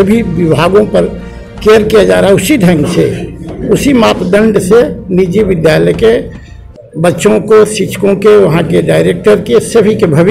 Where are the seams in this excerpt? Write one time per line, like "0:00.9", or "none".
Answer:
none